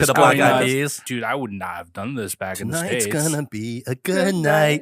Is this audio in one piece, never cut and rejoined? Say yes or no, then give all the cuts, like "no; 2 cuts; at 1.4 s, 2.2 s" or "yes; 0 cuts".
no; 1 cut; at 1.0 s